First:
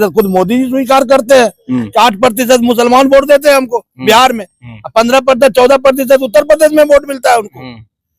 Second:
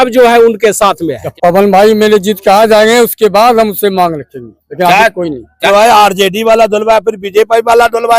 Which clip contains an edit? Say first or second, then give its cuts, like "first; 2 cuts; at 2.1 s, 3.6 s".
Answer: second; 2 cuts; at 1.3 s, 5.7 s